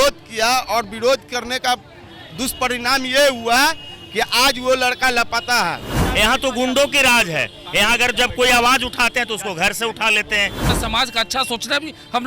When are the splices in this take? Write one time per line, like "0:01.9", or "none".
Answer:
0:06.0
0:10.7